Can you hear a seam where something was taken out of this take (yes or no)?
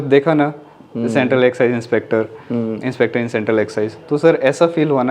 no